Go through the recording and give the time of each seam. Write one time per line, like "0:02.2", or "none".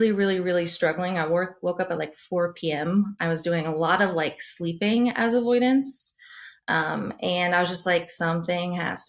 none